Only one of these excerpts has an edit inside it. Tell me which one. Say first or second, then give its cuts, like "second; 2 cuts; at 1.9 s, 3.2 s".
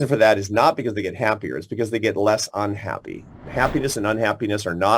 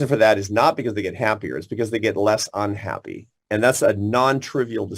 first; 1 cut; at 3.3 s